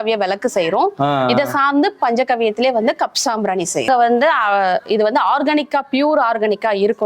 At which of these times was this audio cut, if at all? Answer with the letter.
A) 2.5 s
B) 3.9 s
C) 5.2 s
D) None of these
B